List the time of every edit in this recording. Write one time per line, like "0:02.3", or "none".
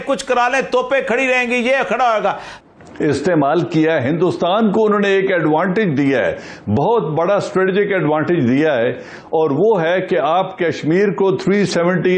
0:02.5